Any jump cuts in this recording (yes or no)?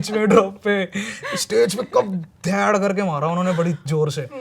no